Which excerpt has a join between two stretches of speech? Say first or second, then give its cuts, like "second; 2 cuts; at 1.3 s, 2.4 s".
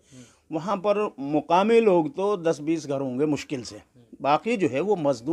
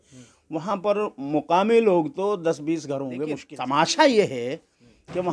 second; 1 cut; at 3.5 s